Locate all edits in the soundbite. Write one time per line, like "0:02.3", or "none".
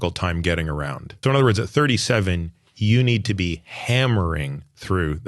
0:01.1